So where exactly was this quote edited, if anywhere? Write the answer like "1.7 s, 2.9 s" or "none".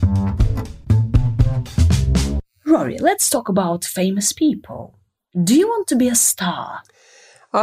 2.5 s